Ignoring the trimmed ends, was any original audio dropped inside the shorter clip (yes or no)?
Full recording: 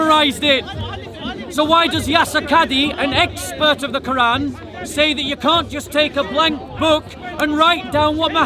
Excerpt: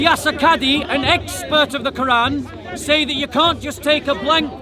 no